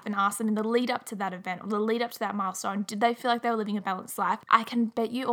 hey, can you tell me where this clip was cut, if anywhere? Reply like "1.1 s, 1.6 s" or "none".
4.4 s